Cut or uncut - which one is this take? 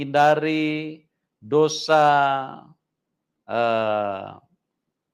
uncut